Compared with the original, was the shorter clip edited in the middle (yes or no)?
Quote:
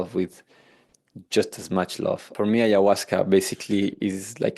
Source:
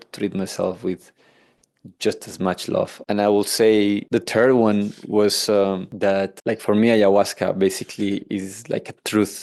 yes